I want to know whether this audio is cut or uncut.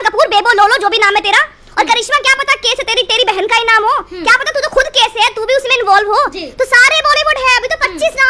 uncut